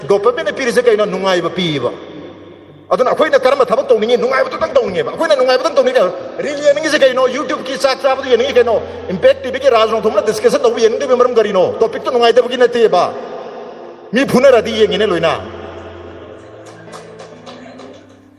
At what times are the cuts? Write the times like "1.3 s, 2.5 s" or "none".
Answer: none